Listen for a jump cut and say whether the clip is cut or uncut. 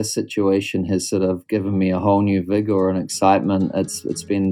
uncut